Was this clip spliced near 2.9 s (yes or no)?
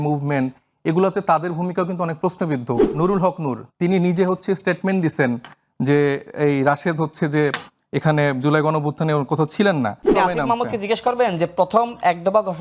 yes